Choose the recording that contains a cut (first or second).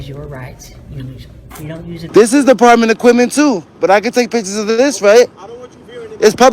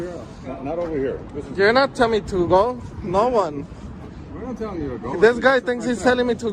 first